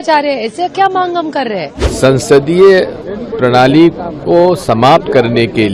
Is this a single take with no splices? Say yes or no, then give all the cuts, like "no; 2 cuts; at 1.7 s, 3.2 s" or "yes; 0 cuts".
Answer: no; 1 cut; at 1.8 s